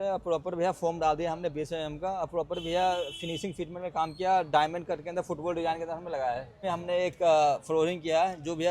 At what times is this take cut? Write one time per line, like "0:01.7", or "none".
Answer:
0:06.6